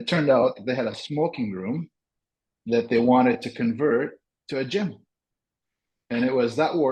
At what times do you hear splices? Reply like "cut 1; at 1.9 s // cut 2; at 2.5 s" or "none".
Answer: none